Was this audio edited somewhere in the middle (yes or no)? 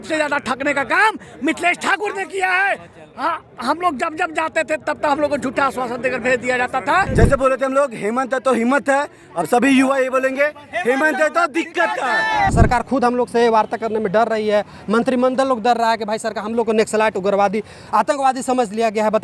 yes